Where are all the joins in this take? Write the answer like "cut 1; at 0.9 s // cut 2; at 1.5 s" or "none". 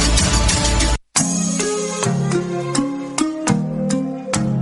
cut 1; at 1.0 s